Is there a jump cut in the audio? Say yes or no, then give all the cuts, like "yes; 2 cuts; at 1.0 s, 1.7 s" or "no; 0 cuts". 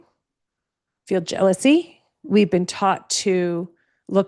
no; 0 cuts